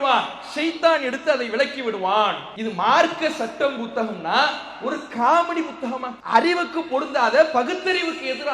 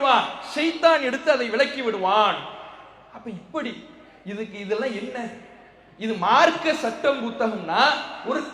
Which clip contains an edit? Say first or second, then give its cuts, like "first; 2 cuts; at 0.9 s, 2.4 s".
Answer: first; 2 cuts; at 2.5 s, 6.1 s